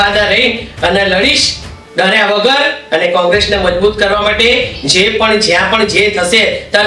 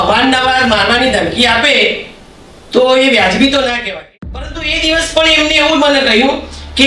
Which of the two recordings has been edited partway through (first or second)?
second